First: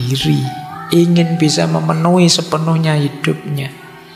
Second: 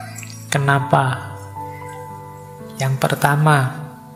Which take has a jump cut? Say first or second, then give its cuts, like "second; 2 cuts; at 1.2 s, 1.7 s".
second; 2 cuts; at 1.4 s, 2.8 s